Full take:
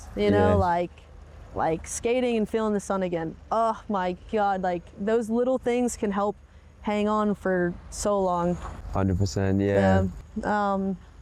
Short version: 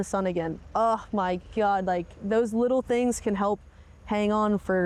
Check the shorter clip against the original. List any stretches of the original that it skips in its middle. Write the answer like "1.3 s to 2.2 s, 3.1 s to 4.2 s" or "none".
none